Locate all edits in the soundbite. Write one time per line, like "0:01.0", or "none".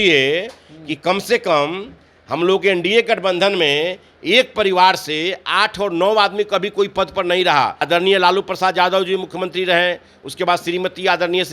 0:07.8